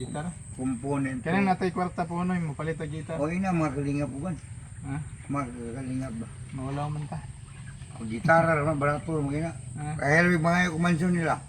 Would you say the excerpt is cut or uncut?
uncut